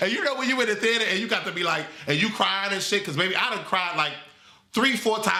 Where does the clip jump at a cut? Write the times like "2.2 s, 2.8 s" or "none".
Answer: none